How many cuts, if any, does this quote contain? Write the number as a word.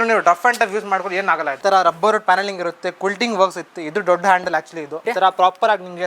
two